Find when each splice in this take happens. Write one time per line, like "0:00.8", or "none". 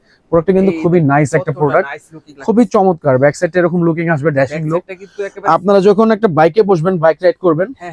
none